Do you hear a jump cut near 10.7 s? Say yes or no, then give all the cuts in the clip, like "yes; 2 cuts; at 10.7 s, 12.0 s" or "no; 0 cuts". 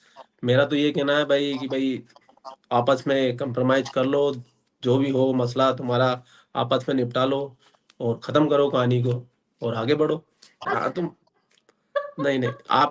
yes; 1 cut; at 10.7 s